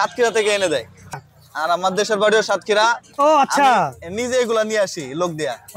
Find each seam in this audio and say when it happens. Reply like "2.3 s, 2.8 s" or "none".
1.1 s